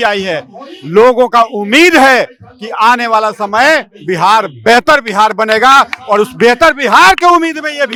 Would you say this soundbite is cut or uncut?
uncut